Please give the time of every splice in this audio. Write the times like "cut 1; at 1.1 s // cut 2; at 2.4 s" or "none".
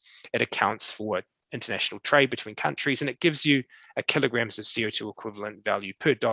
none